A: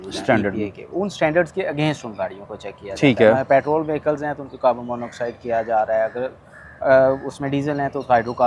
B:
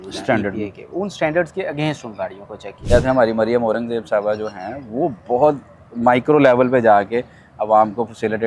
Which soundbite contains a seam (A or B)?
B